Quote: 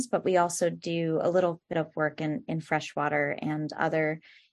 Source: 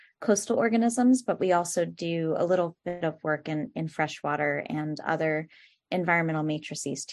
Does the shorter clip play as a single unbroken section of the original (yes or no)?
no